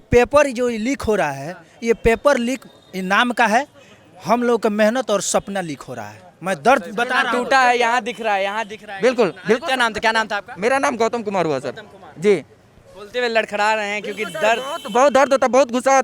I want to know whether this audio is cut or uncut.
uncut